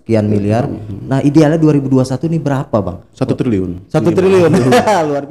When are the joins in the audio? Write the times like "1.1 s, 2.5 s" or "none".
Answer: none